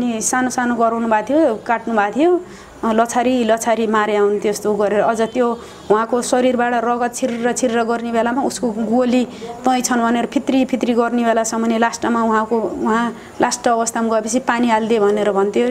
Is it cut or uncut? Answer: uncut